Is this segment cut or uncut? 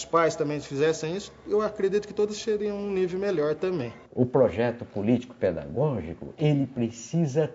cut